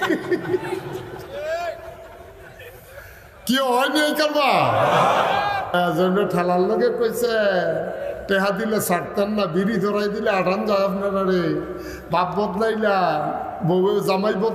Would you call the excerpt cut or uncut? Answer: cut